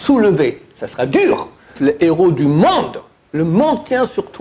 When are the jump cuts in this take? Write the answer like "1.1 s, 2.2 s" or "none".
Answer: 1.7 s